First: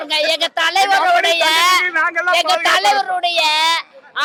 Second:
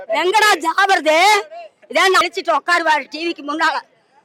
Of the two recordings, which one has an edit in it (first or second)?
second